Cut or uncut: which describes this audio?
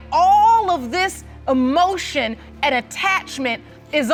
uncut